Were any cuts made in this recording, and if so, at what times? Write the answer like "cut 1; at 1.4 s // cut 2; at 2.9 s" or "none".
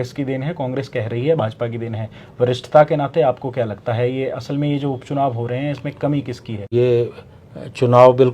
cut 1; at 6.6 s